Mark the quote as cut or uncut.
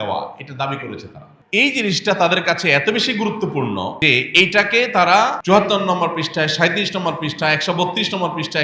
cut